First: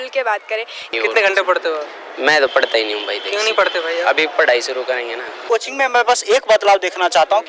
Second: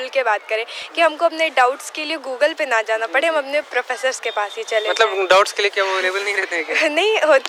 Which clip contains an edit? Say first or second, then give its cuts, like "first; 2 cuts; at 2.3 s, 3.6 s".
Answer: first; 2 cuts; at 0.9 s, 5.3 s